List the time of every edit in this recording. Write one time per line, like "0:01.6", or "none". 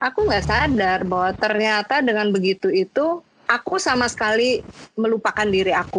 none